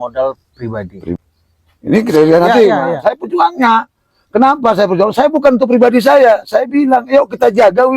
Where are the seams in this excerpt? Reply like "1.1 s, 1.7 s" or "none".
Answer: 1.2 s

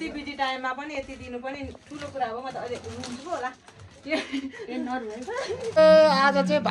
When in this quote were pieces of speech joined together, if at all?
5.7 s

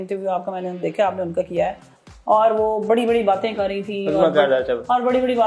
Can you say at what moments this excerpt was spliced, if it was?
none

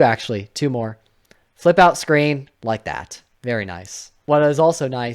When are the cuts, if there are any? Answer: 4.2 s

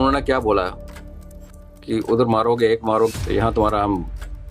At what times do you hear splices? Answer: 3.1 s

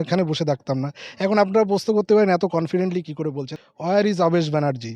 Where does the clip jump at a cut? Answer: 3.4 s

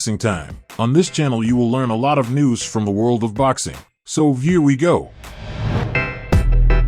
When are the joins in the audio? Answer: 5.9 s

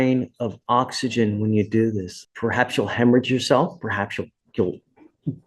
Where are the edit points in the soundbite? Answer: 2.1 s

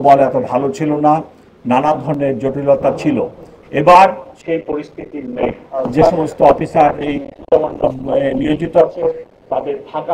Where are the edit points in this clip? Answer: 4.3 s, 5.7 s

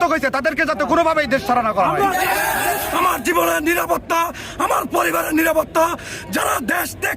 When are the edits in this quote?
2.8 s

